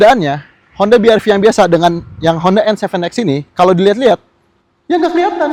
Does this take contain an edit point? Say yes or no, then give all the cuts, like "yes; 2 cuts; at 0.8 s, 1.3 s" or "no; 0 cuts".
no; 0 cuts